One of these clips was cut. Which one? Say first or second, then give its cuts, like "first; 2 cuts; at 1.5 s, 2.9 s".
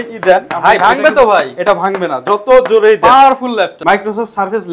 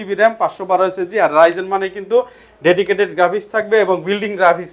first; 1 cut; at 3.7 s